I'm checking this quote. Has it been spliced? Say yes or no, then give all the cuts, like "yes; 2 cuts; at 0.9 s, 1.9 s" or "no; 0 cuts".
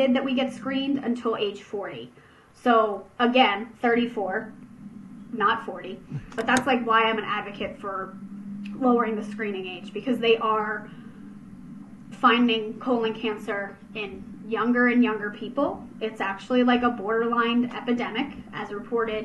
yes; 1 cut; at 6.2 s